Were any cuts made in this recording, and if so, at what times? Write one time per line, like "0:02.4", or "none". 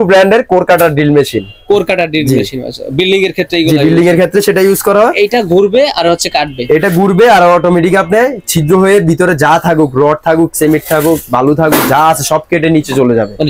none